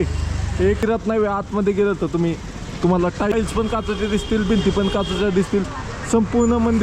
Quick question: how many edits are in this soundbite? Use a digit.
2